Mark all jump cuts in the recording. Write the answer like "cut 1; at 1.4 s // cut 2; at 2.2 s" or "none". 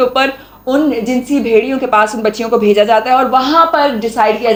none